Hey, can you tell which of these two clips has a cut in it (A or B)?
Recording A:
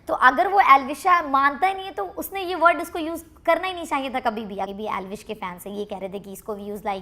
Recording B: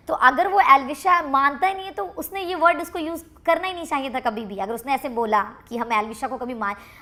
A